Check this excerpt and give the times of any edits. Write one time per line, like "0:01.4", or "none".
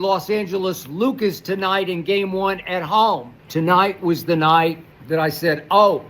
0:03.3
0:04.9